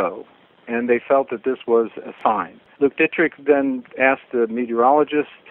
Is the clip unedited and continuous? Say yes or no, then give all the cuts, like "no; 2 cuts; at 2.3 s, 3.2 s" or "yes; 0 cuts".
no; 2 cuts; at 2.6 s, 3.9 s